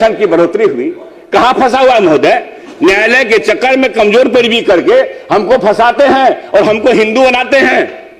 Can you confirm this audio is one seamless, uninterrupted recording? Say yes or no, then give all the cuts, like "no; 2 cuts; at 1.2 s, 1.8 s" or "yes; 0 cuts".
yes; 0 cuts